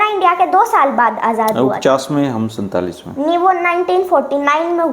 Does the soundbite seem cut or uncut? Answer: uncut